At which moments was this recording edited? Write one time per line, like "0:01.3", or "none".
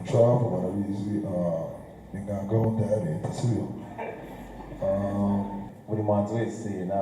0:05.7

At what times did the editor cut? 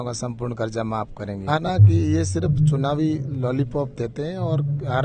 0:01.5

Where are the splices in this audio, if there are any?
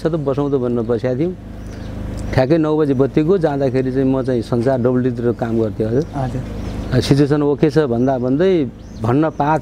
none

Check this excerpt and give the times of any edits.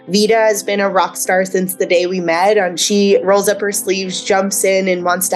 0:02.8

